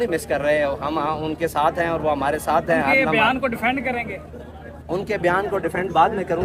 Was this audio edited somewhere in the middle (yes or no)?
no